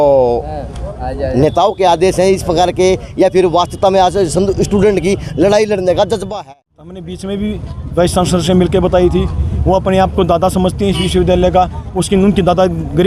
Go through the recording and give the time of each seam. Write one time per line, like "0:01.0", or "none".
0:06.3